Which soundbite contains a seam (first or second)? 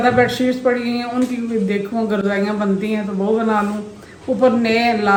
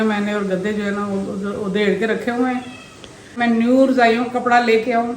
second